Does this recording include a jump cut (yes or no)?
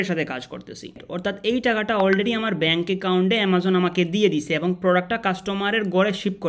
yes